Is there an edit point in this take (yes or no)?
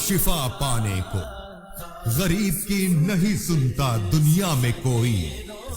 yes